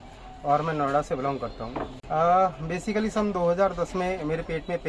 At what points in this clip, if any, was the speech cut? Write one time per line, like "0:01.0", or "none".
0:01.9